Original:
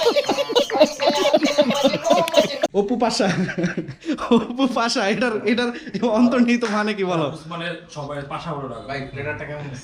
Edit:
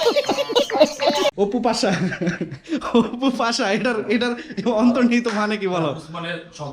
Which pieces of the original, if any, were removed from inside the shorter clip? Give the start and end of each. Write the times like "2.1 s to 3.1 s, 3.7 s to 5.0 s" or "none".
1.3 s to 2.7 s